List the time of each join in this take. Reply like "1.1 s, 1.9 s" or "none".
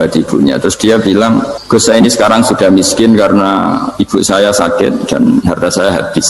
1.6 s